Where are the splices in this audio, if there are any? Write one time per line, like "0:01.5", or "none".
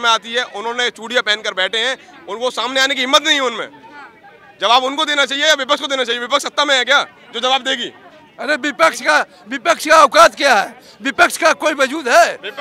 none